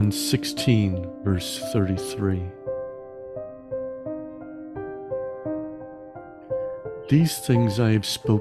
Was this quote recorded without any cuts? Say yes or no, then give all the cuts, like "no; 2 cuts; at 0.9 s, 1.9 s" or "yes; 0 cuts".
yes; 0 cuts